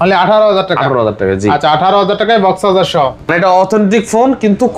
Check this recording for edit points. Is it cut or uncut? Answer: cut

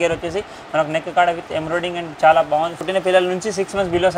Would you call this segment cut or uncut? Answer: cut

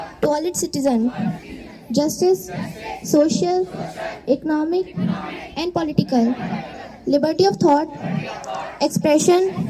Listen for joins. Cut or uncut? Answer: uncut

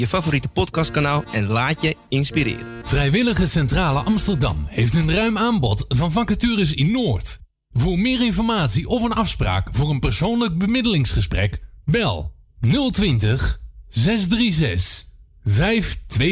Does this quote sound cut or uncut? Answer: uncut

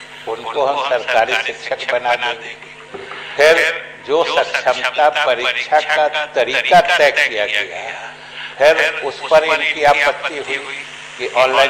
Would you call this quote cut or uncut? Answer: uncut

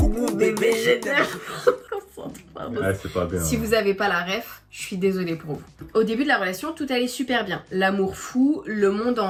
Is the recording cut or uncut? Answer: uncut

